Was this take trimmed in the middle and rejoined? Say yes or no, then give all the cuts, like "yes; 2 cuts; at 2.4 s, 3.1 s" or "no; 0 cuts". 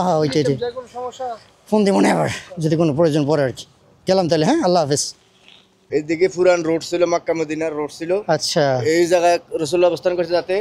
yes; 1 cut; at 5.9 s